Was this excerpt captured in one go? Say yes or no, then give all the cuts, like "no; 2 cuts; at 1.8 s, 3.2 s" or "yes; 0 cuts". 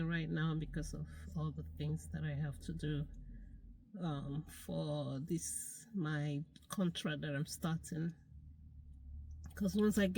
yes; 0 cuts